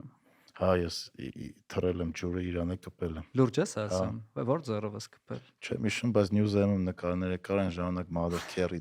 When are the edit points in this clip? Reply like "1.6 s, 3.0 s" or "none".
none